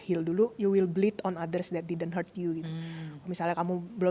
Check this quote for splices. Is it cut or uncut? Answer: uncut